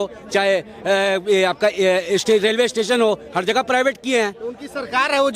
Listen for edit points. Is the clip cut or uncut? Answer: uncut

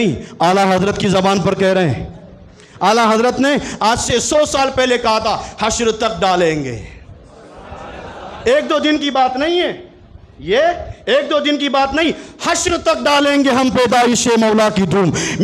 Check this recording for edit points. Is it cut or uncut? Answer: uncut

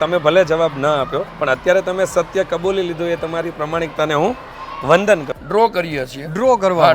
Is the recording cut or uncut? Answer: cut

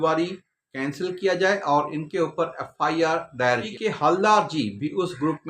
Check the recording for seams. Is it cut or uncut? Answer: cut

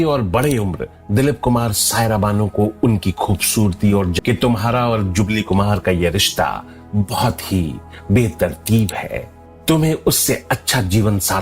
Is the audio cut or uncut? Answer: cut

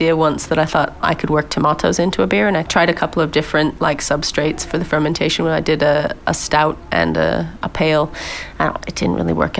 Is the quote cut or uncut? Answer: cut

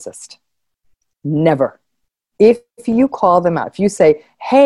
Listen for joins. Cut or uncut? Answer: cut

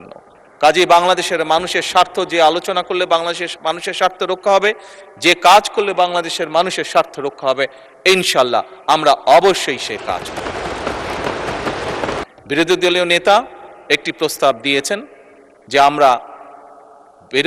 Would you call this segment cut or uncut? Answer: cut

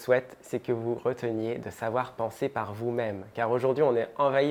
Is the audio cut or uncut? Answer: uncut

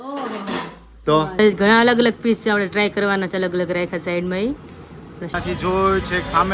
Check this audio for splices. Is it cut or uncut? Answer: cut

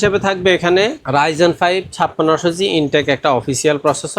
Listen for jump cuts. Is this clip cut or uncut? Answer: cut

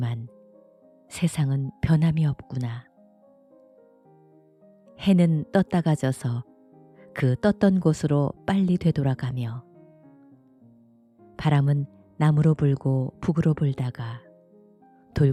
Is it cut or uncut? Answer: uncut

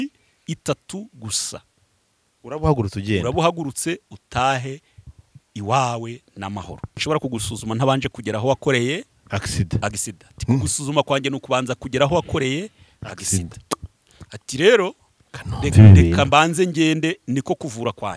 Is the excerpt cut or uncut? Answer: cut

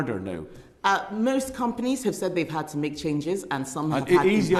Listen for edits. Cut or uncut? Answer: uncut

